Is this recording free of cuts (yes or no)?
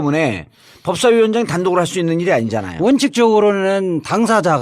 no